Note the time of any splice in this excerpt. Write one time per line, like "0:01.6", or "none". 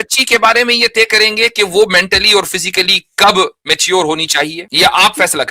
0:04.6